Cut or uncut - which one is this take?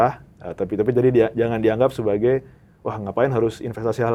uncut